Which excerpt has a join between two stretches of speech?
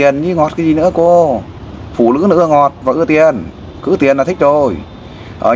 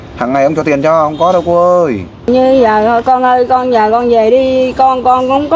second; 1 cut; at 2.3 s

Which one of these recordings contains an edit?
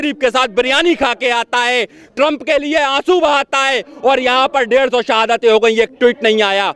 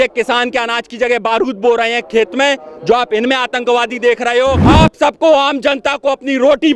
second; 1 cut; at 4.6 s

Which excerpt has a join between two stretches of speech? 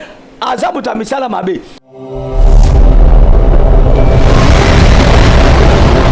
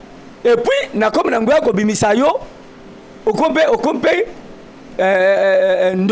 first; 1 cut; at 1.7 s

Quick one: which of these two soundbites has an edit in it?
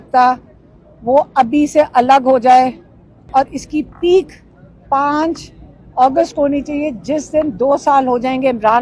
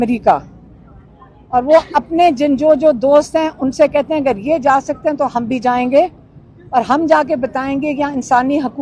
first; 1 cut; at 3.3 s

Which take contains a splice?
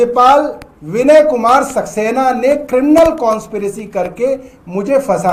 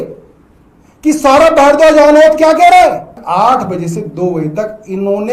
second; 1 cut; at 3.1 s

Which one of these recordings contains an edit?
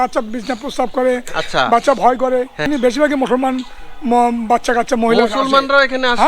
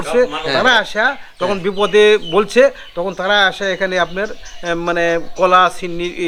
first; 1 cut; at 2.7 s

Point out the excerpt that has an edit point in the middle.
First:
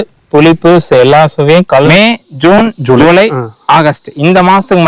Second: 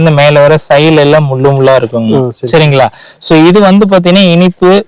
first; 1 cut; at 1.9 s

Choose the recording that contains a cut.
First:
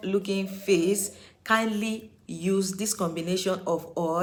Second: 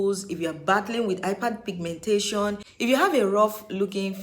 second; 1 cut; at 2.7 s

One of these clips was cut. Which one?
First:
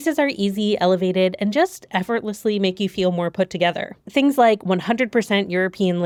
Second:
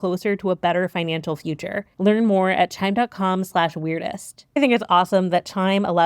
second; 2 cuts; at 1.9 s, 4.6 s

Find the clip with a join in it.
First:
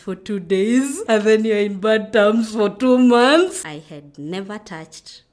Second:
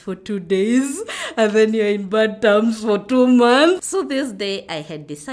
first; 2 cuts; at 1.0 s, 3.6 s

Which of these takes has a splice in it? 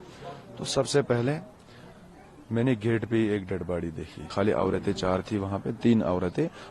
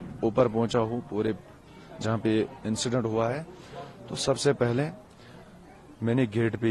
first; 1 cut; at 4.2 s

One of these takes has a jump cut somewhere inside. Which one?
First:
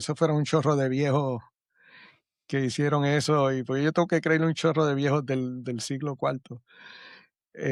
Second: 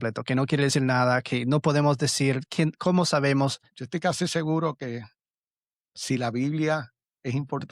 second; 1 cut; at 3.7 s

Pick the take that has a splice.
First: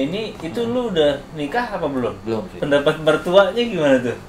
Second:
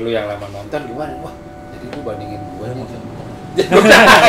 first; 1 cut; at 2.5 s

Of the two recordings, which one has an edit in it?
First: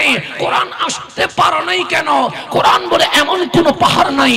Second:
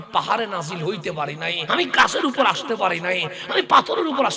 second; 1 cut; at 1.6 s

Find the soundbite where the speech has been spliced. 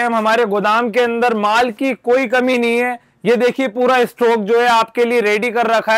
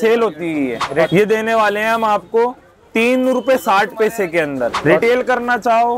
second; 2 cuts; at 1.1 s, 4.8 s

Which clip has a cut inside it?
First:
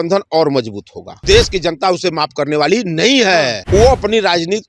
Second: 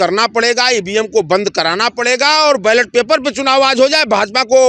first; 2 cuts; at 1.2 s, 3.6 s

